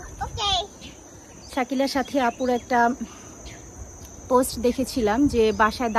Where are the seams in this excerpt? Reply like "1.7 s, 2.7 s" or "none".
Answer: none